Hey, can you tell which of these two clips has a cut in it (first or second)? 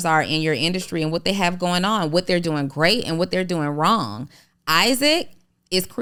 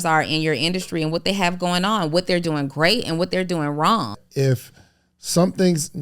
second